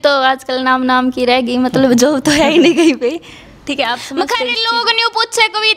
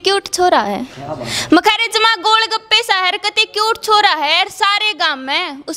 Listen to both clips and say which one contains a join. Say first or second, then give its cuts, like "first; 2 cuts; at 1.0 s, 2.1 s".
first; 1 cut; at 4.1 s